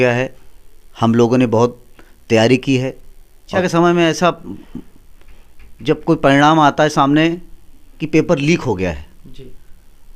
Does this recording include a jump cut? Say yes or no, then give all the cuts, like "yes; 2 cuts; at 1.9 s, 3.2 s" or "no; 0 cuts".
yes; 1 cut; at 3.5 s